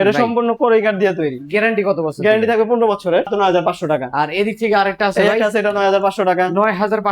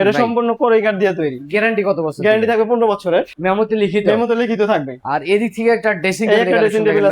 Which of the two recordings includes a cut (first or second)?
first